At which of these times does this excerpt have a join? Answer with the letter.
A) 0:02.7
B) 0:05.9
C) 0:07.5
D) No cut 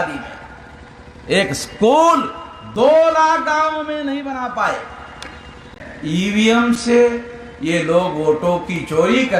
B